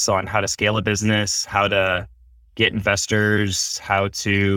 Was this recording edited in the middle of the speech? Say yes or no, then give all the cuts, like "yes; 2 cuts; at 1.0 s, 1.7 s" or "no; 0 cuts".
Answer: no; 0 cuts